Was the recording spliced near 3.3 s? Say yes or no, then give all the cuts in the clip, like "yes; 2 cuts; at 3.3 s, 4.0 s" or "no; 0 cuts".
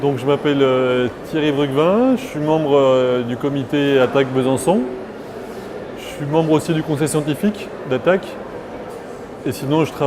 yes; 1 cut; at 3.3 s